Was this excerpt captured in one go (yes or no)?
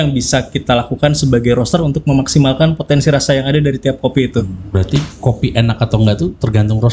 no